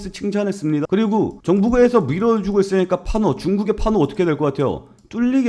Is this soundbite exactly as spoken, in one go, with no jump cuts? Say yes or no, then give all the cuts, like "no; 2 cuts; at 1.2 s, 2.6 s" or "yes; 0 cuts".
yes; 0 cuts